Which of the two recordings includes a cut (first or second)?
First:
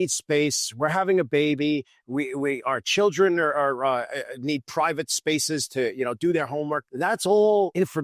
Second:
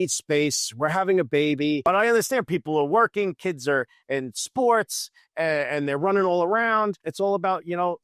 second